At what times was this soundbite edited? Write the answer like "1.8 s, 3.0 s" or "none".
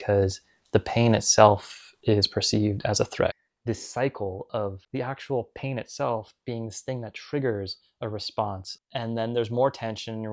3.3 s, 8.7 s